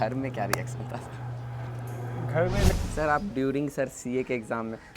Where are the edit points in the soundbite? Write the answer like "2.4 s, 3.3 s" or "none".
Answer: 2.8 s

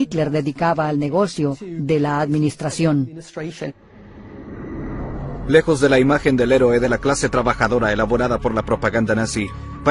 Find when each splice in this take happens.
6.2 s

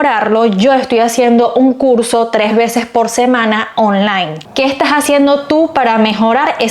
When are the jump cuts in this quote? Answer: 4.4 s

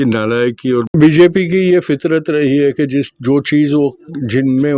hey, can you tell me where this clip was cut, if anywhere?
0.9 s

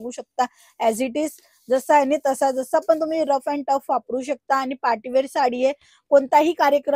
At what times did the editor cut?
none

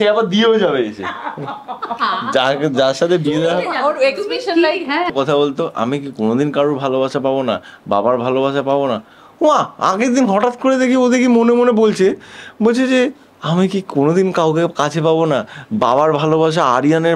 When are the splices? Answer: 5.1 s

